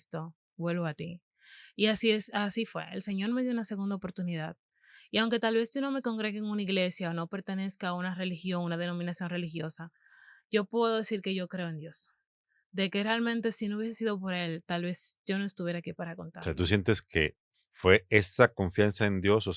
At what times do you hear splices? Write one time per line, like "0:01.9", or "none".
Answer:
none